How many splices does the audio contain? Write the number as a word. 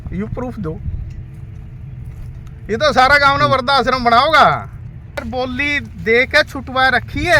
one